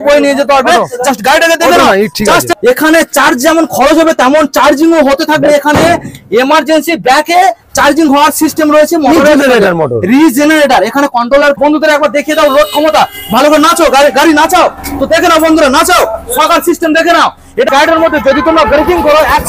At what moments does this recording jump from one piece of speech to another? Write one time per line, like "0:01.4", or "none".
0:02.5
0:11.6
0:17.7

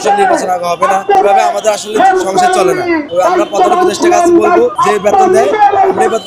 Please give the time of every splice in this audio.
0:01.2
0:03.1
0:04.7

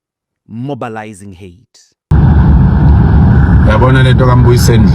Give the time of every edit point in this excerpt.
0:02.1

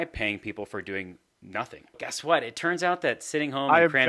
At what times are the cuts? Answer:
0:02.1

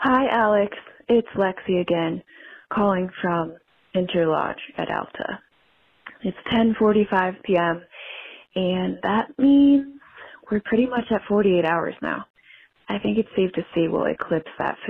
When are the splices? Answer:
none

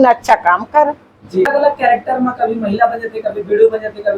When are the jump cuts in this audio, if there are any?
0:01.5

